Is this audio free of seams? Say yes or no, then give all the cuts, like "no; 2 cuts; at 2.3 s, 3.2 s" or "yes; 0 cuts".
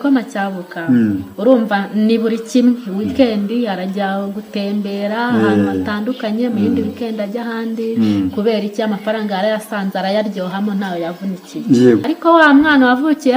no; 1 cut; at 12.1 s